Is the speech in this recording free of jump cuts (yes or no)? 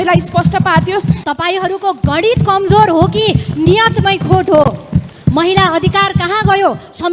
no